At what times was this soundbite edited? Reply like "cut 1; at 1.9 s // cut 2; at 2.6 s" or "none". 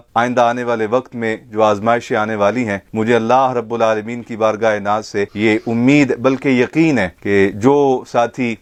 none